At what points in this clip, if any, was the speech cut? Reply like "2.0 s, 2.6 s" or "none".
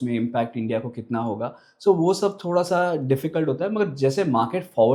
none

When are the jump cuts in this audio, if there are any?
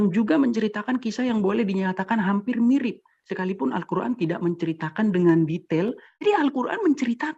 6.2 s

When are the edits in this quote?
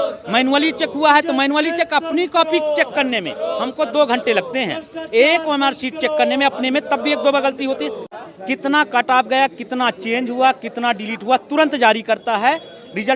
8.0 s

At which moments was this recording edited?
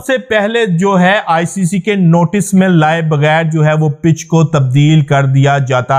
none

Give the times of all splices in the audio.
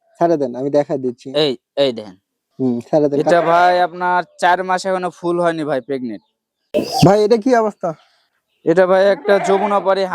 3.3 s, 6.6 s

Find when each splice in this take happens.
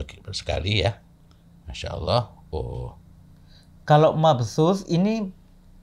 none

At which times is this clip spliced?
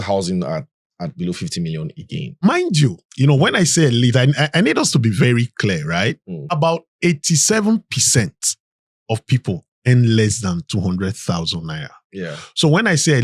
2.4 s, 6.5 s

